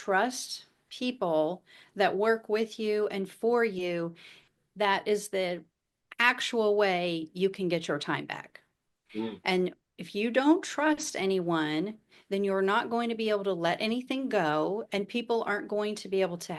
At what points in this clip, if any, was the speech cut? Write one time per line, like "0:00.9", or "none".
none